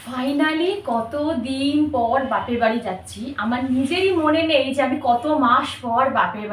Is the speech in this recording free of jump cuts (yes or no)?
yes